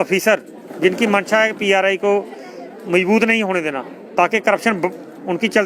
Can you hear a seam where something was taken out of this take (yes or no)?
no